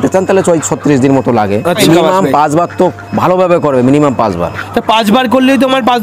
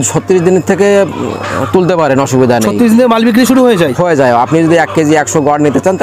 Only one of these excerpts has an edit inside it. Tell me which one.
first; 1 cut; at 1.8 s

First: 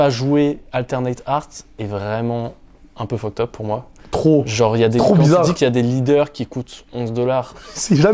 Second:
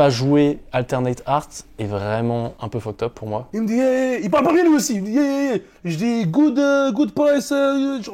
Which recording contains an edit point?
second; 2 cuts; at 2.6 s, 3.5 s

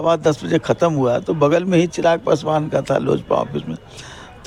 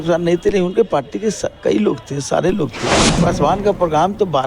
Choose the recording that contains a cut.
second; 1 cut; at 3.2 s

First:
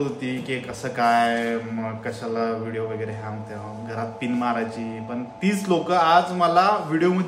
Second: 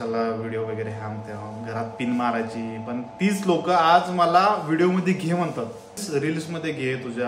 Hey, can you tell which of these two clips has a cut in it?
second; 1 cut; at 6.0 s

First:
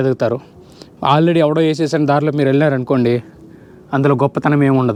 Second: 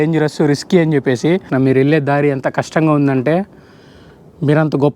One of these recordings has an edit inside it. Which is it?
second; 1 cut; at 1.5 s

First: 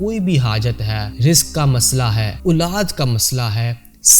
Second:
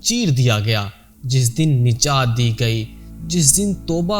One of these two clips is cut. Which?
first; 2 cuts; at 1.0 s, 2.3 s

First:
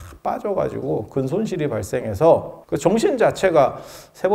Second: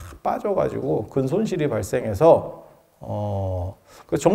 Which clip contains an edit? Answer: first; 1 cut; at 2.6 s

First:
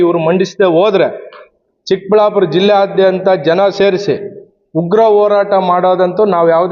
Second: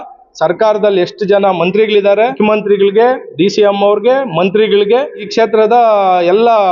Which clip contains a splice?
second; 2 cuts; at 2.3 s, 5.2 s

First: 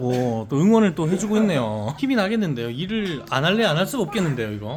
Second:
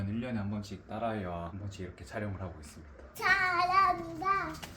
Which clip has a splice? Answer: second; 2 cuts; at 1.5 s, 3.0 s

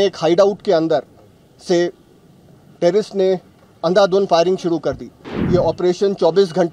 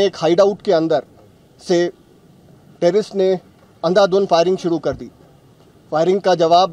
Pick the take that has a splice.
first; 1 cut; at 5.3 s

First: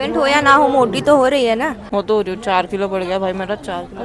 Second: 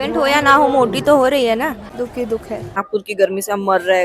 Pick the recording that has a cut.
second; 2 cuts; at 1.8 s, 2.8 s

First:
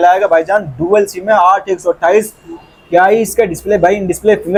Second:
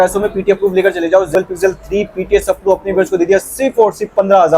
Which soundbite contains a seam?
second; 1 cut; at 1.3 s

